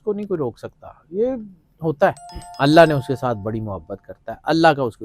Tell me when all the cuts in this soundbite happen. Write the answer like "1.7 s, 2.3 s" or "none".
2.5 s